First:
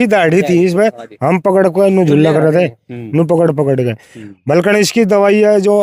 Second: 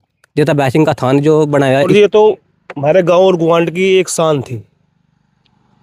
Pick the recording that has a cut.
second; 1 cut; at 1.9 s

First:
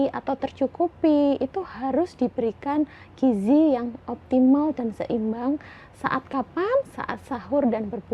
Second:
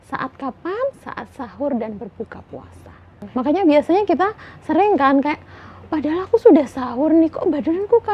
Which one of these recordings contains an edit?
second; 1 cut; at 3.2 s

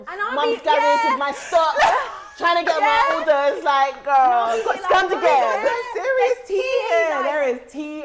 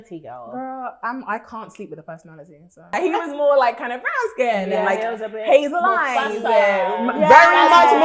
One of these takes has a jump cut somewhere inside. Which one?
second; 1 cut; at 3.0 s

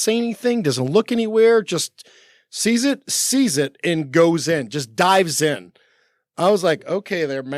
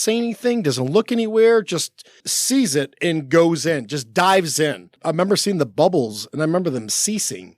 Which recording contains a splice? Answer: second; 2 cuts; at 2.3 s, 5.0 s

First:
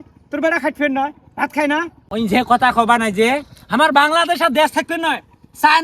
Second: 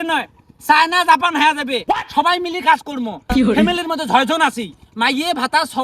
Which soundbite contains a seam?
first; 1 cut; at 2.0 s

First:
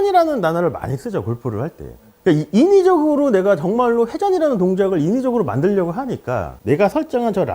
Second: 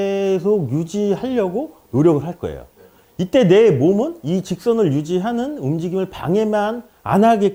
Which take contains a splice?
first; 1 cut; at 6.5 s

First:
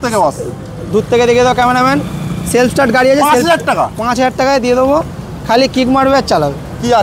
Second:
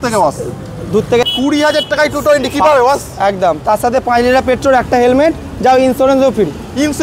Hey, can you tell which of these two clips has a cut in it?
second; 1 cut; at 1.2 s

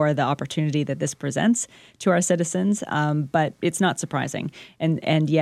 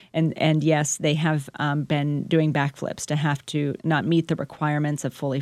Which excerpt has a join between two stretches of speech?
second; 1 cut; at 3.8 s

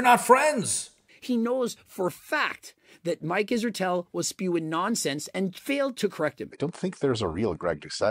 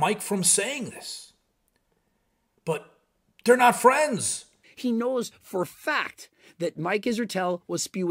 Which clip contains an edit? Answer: first; 1 cut; at 6.5 s

